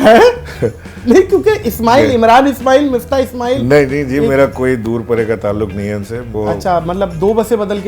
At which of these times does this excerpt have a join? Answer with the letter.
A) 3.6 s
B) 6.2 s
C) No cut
B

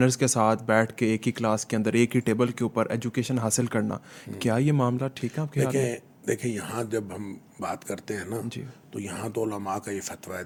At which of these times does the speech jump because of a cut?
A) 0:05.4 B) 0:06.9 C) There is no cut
C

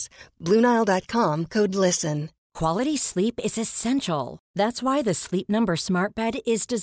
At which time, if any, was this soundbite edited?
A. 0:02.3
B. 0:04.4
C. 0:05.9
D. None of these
A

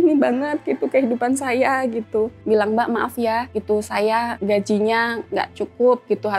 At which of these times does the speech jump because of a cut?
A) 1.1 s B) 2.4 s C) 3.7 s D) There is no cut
B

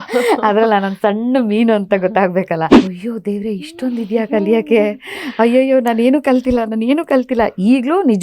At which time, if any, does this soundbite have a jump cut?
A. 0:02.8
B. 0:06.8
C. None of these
A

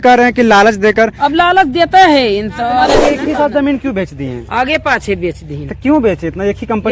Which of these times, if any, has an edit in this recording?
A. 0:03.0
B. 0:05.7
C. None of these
A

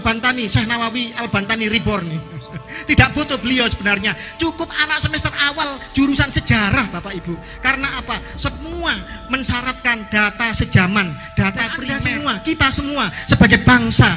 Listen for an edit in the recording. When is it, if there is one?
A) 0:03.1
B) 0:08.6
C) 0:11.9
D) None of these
C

